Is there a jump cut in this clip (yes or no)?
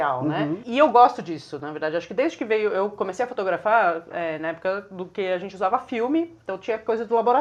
no